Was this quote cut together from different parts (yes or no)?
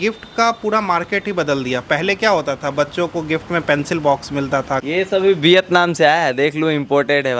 yes